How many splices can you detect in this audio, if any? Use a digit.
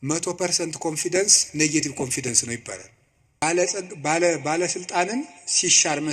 1